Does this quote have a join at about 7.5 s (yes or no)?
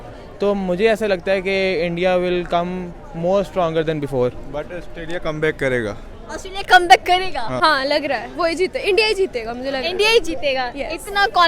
yes